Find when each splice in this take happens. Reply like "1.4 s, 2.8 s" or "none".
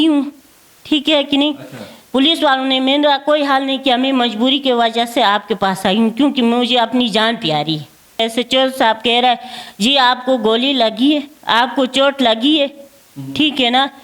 8.2 s